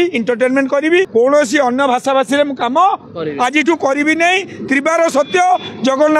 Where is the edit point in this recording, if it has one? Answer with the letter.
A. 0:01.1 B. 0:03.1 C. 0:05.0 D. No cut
A